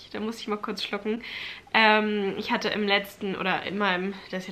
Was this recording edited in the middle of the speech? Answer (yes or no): no